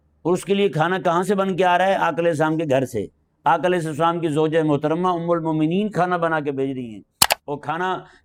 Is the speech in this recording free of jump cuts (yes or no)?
yes